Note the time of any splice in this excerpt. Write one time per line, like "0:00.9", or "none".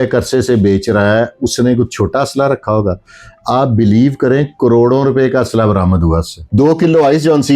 0:06.4